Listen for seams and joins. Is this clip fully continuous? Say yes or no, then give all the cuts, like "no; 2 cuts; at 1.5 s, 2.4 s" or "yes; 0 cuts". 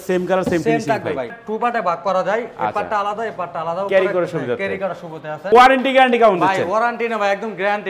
no; 2 cuts; at 1.4 s, 5.5 s